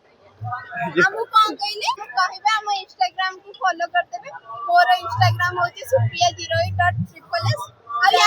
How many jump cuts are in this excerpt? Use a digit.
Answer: 1